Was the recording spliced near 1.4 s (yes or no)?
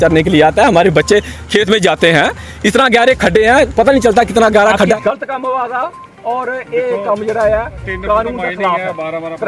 no